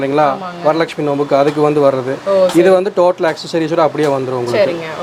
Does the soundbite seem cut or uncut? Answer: uncut